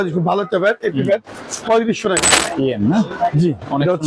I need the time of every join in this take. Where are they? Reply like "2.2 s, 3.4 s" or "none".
2.3 s

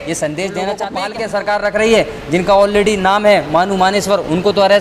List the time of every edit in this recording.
1.0 s

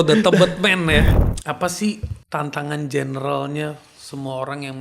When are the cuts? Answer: 1.2 s, 2.1 s

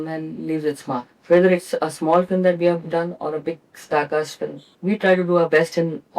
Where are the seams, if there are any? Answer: 1.1 s, 4.7 s

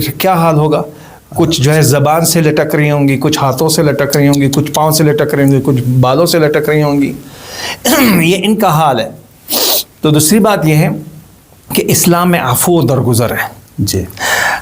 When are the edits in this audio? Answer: none

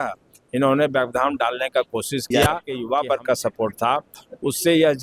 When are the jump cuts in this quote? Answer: 2.7 s

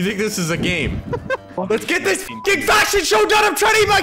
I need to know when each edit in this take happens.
1.5 s

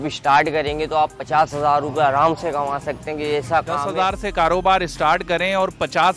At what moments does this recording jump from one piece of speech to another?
3.9 s

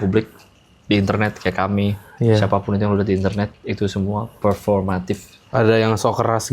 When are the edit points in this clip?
5.3 s

